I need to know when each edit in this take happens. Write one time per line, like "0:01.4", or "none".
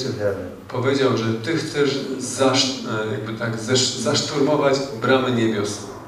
none